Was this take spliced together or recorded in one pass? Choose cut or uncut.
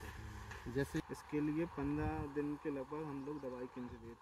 cut